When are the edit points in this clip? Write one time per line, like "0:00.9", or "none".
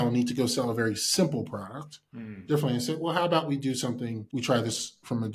0:04.2